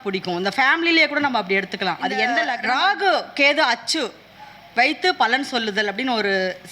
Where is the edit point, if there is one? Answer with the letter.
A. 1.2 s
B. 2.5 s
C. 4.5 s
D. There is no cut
B